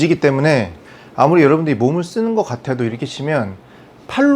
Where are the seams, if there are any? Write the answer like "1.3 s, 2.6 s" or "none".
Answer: none